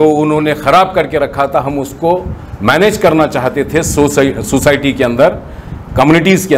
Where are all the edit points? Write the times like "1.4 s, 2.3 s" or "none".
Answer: none